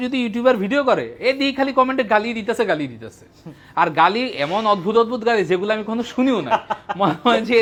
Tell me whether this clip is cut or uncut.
uncut